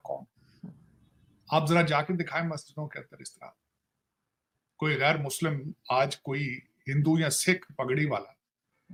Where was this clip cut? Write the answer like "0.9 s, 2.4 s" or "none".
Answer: none